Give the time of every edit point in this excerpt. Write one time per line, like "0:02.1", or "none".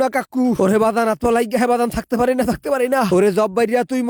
none